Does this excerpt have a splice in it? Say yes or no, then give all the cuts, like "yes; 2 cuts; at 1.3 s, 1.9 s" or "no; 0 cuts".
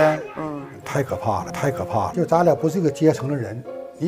yes; 1 cut; at 2.1 s